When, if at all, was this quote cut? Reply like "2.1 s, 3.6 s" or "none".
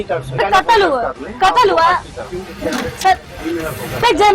none